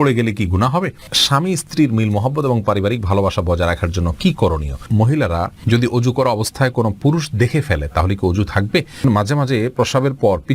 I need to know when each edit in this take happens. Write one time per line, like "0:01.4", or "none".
0:01.1
0:04.8
0:09.0